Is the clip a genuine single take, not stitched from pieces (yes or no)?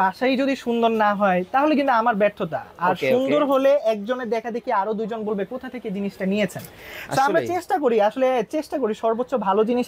yes